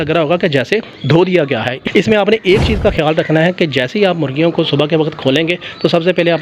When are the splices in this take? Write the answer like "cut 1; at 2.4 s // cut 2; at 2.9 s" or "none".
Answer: cut 1; at 1.8 s